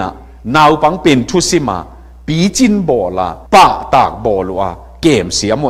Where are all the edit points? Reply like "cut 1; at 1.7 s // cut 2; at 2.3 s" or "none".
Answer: none